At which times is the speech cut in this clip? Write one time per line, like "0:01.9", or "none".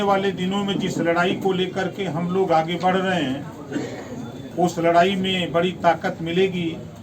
0:04.4